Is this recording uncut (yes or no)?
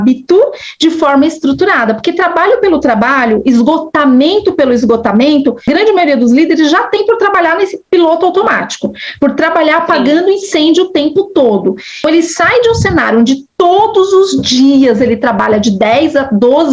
no